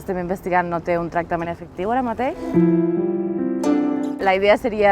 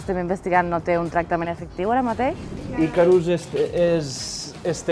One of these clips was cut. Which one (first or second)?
second